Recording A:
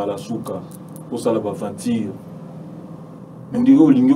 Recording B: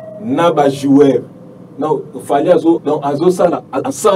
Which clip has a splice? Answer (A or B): B